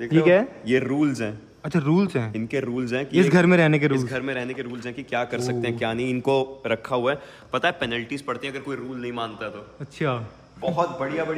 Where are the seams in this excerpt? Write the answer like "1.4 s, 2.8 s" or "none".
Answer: none